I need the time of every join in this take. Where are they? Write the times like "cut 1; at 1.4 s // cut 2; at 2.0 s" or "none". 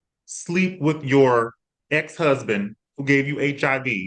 none